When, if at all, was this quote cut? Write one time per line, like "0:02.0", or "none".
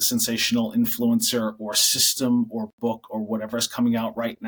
none